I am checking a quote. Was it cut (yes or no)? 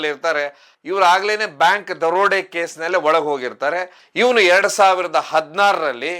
yes